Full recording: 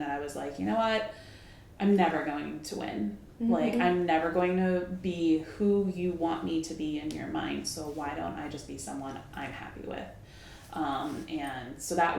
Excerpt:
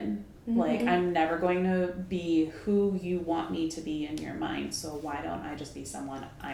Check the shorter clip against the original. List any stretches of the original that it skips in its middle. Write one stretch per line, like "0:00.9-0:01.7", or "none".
none